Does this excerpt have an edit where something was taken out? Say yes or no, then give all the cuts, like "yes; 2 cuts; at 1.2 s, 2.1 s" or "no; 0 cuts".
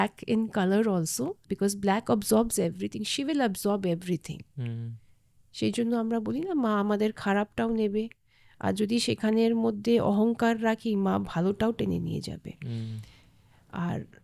yes; 1 cut; at 1.4 s